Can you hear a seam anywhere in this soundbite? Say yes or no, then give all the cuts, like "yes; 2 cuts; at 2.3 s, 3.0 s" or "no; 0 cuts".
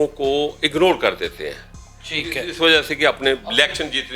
no; 0 cuts